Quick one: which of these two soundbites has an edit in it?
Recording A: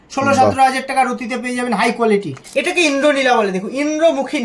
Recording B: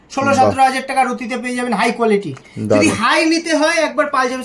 A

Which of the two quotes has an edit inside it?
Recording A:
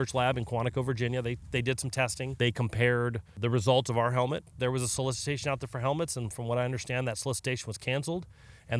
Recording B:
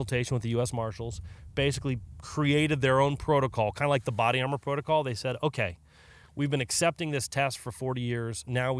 A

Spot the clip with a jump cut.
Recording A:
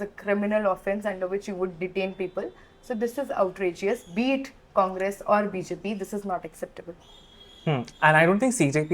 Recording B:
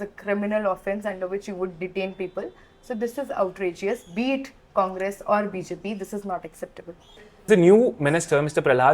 B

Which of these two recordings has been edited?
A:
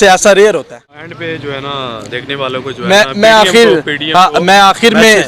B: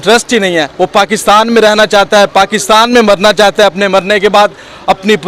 A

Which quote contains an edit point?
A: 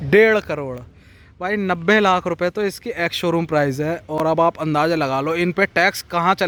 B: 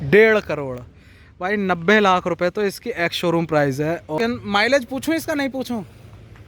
B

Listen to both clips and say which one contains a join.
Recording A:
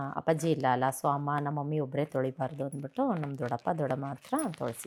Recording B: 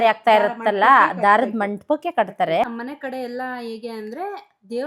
B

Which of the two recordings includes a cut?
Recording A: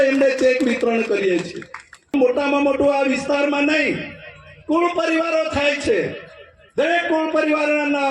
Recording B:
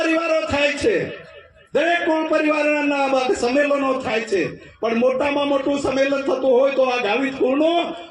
A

